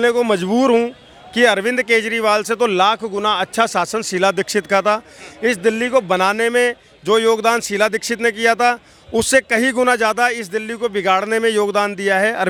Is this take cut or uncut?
uncut